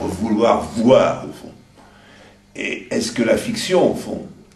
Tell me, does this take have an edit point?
yes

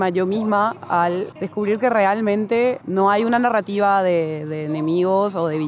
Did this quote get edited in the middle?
no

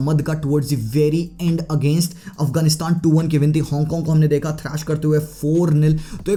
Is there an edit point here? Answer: no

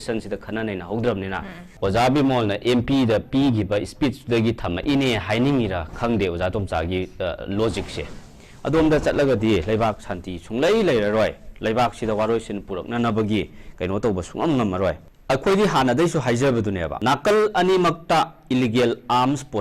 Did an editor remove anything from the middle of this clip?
yes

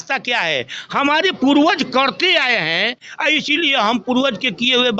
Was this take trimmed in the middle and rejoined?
no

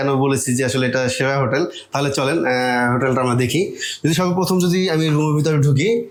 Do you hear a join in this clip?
no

